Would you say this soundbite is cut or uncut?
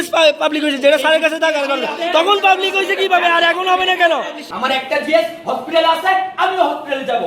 cut